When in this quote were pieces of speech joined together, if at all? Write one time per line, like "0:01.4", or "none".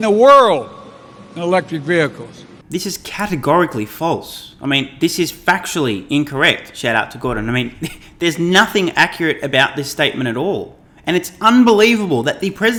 none